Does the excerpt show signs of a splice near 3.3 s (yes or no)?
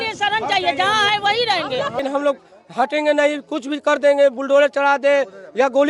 no